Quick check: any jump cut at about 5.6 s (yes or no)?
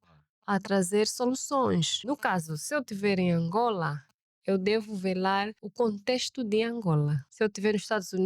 yes